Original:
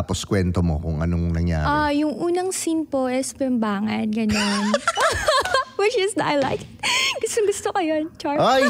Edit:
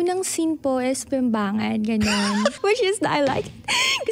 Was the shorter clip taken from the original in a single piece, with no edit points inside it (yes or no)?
no